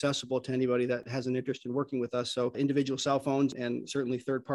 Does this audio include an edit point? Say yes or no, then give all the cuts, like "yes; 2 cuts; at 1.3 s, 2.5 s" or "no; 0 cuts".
yes; 2 cuts; at 1.0 s, 3.5 s